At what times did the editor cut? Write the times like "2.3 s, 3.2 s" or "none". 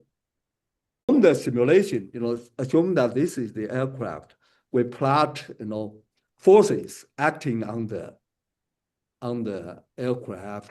1.1 s